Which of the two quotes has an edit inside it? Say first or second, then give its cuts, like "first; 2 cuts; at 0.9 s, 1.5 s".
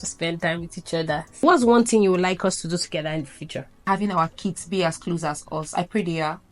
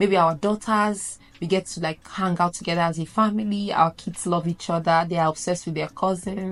first; 2 cuts; at 1.4 s, 3.8 s